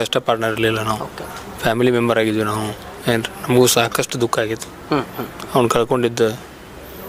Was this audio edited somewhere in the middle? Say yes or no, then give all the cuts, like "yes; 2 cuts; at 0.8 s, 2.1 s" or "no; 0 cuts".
no; 0 cuts